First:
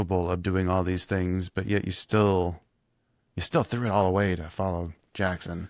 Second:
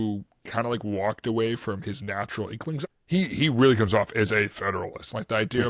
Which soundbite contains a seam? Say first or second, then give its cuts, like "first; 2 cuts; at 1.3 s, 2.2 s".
second; 1 cut; at 2.8 s